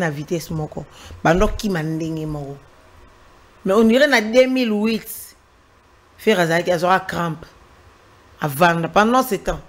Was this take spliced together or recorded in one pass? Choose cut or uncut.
uncut